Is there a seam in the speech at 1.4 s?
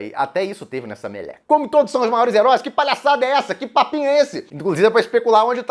yes; 2 cuts; at 1.4 s, 4.4 s

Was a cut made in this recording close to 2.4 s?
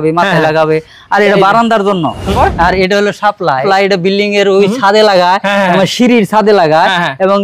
yes; 2 cuts; at 2.4 s, 3.6 s

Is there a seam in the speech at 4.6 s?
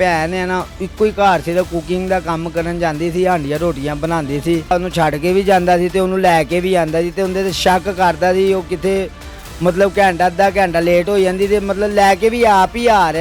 no; 0 cuts

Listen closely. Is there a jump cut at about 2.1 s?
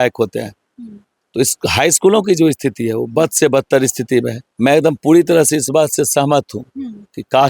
no; 1 cut; at 4.4 s

